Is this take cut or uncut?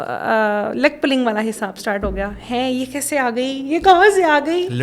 uncut